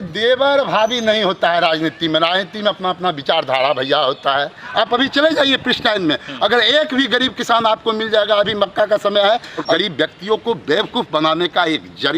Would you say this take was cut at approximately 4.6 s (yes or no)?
yes